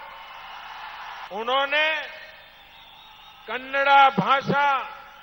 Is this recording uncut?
no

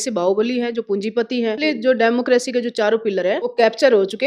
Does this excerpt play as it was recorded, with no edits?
no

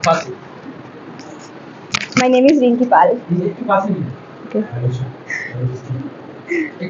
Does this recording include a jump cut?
no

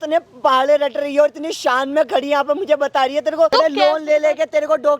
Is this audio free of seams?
no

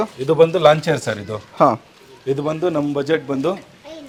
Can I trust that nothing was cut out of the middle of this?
yes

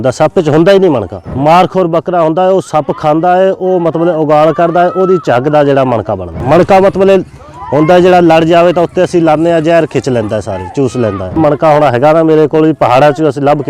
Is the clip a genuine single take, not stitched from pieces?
no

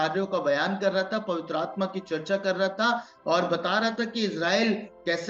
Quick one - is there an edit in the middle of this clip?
no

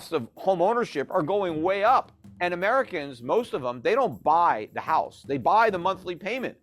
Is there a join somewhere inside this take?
yes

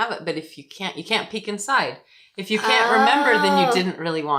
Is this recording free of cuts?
yes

